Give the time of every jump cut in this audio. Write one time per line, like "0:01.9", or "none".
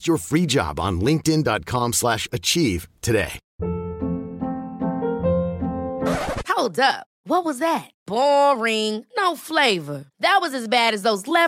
0:03.4